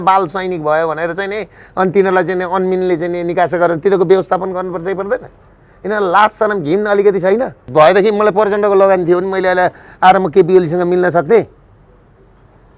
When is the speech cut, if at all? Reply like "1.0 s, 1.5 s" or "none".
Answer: 7.7 s